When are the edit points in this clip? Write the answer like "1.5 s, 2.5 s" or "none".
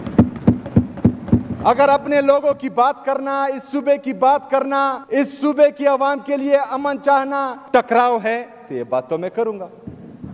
5.0 s, 7.6 s